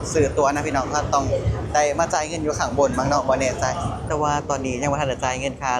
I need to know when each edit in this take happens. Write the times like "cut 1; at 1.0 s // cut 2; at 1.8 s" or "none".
cut 1; at 4.0 s